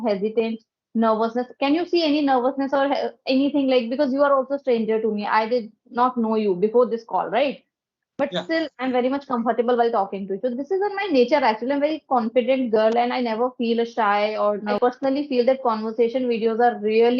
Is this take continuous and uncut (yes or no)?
no